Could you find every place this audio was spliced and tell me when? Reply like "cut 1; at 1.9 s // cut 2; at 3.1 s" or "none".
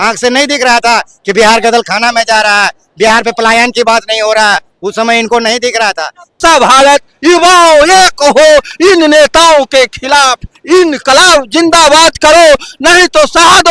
cut 1; at 6.4 s